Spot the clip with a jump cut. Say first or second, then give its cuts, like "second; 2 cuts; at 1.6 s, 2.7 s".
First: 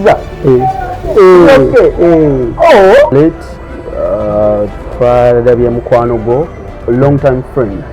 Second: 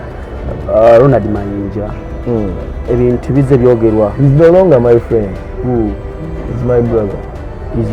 first; 1 cut; at 3.1 s